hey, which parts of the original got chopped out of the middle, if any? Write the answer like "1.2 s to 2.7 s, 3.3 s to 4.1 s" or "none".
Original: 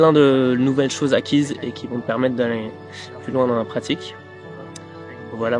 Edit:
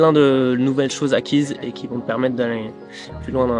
none